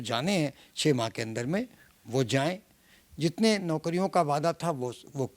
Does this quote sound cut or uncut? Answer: uncut